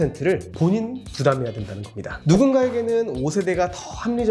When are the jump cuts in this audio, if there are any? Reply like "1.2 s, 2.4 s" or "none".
2.2 s

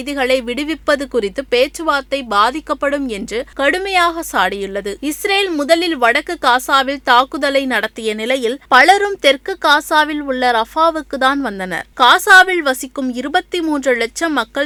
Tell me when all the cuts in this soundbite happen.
none

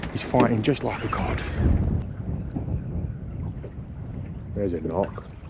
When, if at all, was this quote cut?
2.1 s

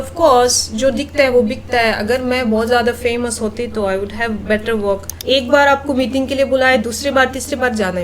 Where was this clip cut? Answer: 5.1 s

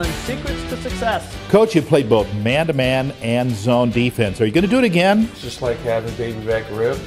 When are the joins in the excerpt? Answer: 1.3 s, 5.4 s

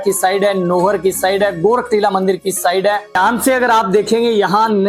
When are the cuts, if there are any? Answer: 3.2 s

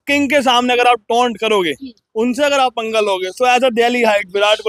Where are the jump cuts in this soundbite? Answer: none

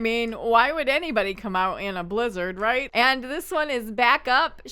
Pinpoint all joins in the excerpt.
2.9 s

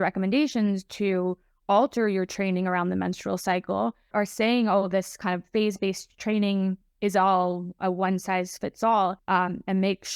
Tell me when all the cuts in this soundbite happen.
9.2 s

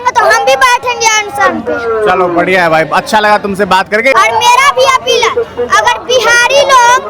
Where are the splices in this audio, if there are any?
4.1 s

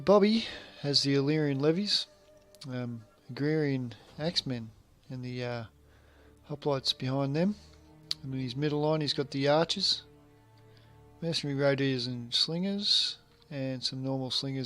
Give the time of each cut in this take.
3.0 s

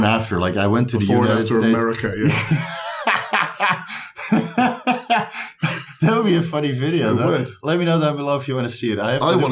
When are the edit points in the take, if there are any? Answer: none

